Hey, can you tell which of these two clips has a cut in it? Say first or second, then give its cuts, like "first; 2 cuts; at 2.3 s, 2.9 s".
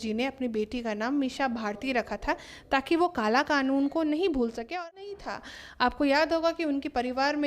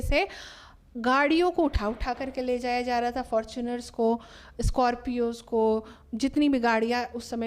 first; 1 cut; at 4.8 s